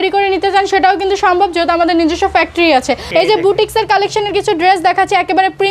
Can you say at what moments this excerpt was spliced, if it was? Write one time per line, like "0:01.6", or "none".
0:03.0